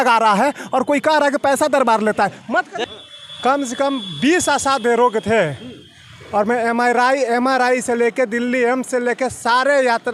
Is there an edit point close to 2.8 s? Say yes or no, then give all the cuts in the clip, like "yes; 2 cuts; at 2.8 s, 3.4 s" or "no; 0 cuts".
yes; 1 cut; at 2.8 s